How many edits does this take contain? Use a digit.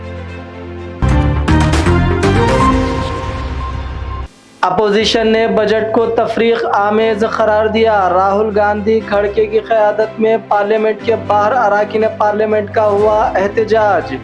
1